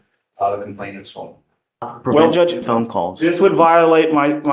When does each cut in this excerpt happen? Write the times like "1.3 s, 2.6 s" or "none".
1.9 s